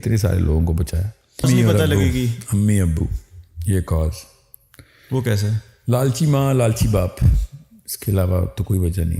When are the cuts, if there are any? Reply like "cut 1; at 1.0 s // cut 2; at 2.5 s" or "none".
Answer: cut 1; at 1.4 s